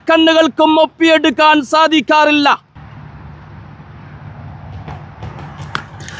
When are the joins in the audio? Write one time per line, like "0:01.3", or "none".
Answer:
0:02.8